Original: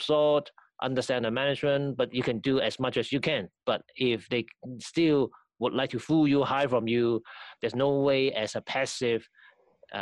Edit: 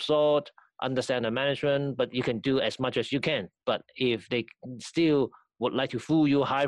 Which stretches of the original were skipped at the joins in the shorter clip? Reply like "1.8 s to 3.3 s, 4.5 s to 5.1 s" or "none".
none

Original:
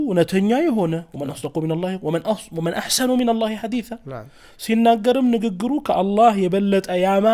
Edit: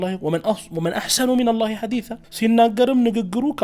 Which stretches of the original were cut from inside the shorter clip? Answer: 4.0 s to 4.5 s

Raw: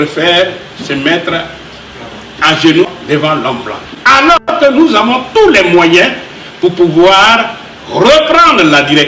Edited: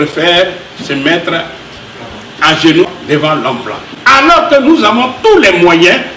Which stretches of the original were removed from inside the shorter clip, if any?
4.6 s to 4.7 s

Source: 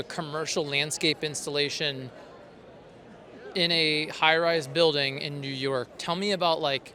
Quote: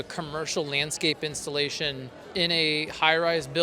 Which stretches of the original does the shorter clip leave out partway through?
2.1 s to 3.3 s

